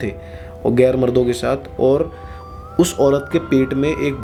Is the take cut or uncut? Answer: uncut